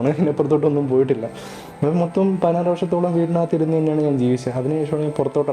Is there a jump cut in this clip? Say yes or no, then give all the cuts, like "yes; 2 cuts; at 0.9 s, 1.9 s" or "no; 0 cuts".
no; 0 cuts